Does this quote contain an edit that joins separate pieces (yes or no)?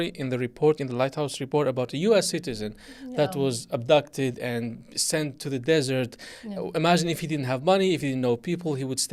no